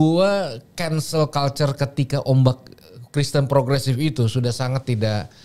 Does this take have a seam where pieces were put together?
no; 0 cuts

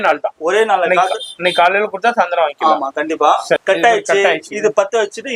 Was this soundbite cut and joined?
yes; 1 cut; at 3.6 s

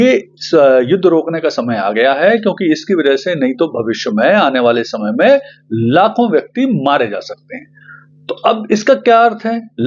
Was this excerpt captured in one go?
yes; 0 cuts

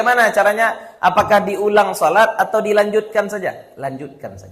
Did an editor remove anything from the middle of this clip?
no; 0 cuts

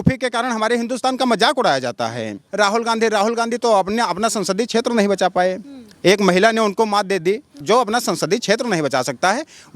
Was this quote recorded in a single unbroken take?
no; 2 cuts; at 2.4 s, 7.6 s

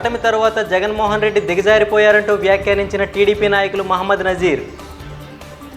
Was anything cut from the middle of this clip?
yes; 1 cut; at 4.7 s

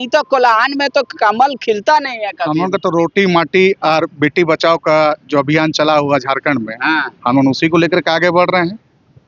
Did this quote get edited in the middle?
no; 0 cuts

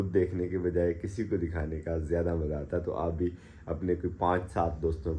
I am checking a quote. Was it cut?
no; 0 cuts

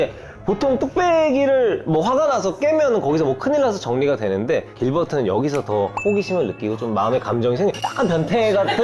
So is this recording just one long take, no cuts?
yes; 0 cuts

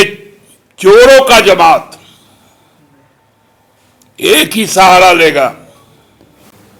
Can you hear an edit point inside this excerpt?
no; 0 cuts

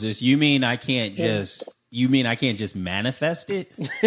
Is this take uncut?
yes; 0 cuts

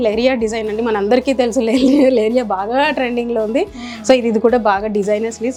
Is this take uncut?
yes; 0 cuts

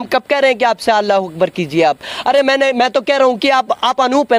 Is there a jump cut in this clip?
no; 0 cuts

